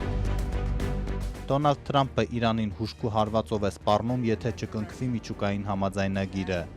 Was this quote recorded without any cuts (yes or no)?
no